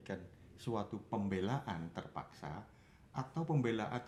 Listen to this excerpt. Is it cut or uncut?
uncut